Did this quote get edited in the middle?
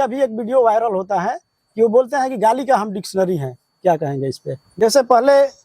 yes; 1 cut; at 4.6 s

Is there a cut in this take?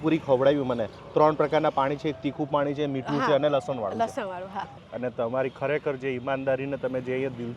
yes; 1 cut; at 4.7 s

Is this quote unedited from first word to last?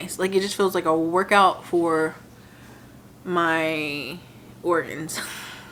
yes; 0 cuts

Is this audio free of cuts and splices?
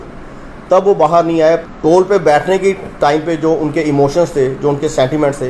no; 1 cut; at 1.6 s

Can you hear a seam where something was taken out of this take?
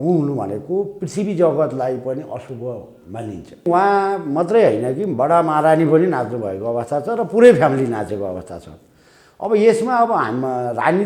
yes; 1 cut; at 3.7 s

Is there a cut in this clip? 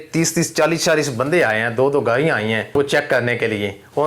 yes; 1 cut; at 2.7 s

